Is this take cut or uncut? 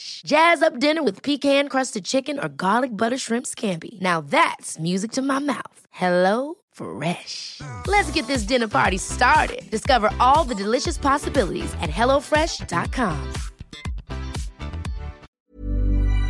cut